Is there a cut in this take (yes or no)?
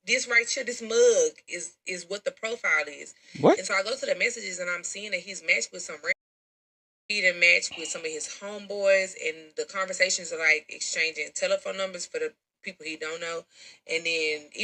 no